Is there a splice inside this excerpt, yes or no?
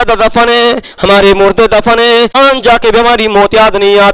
yes